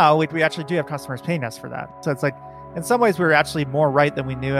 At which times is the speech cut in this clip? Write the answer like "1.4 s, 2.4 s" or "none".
2.0 s